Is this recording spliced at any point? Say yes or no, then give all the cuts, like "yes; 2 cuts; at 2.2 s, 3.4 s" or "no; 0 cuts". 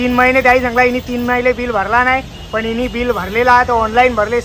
no; 0 cuts